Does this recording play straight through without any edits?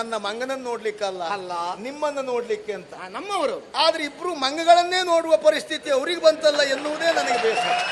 yes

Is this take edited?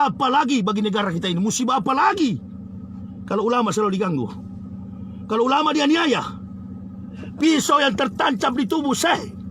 no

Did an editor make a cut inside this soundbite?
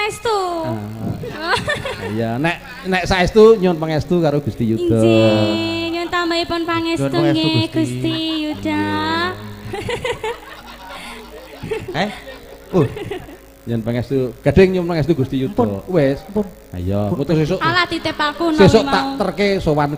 yes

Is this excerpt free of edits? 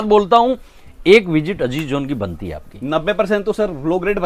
yes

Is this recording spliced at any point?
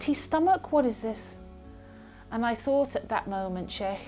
no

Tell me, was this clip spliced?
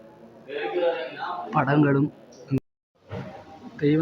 yes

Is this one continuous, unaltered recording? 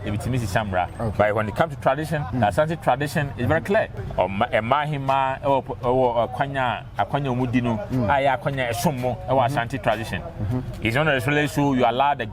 no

